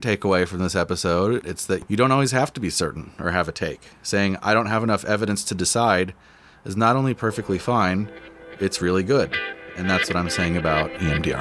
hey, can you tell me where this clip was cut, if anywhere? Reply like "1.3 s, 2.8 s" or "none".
1.4 s